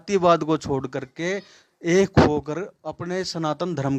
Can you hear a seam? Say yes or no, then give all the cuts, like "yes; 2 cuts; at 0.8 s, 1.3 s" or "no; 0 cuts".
no; 0 cuts